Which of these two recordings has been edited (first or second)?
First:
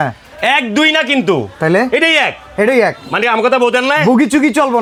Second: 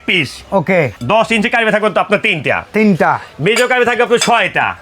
second